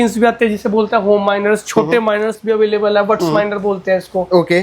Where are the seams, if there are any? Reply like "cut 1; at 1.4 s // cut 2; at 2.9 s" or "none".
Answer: cut 1; at 2.4 s